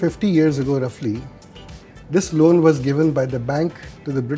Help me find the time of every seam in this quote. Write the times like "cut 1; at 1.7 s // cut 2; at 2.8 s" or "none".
none

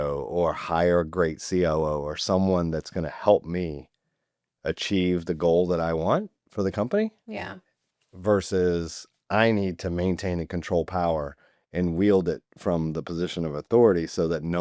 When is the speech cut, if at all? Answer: none

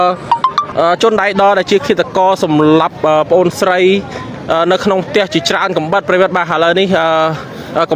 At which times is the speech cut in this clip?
none

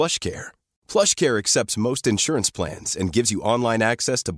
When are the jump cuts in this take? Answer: none

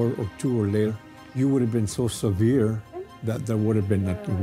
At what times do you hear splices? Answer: cut 1; at 0.9 s

